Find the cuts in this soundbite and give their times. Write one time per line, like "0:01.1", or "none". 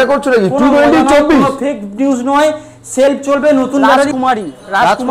0:04.1